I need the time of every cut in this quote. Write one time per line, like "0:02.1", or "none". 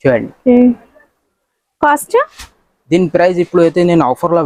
none